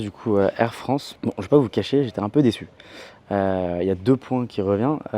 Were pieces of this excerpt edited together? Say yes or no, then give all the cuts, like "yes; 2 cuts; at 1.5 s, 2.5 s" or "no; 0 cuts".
yes; 1 cut; at 1.1 s